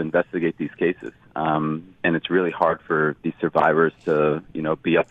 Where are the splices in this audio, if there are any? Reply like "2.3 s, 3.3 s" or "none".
none